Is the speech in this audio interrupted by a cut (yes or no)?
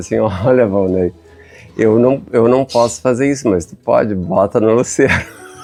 no